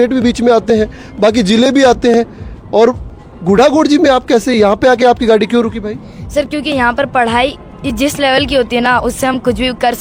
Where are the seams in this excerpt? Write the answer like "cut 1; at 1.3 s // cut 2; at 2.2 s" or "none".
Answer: none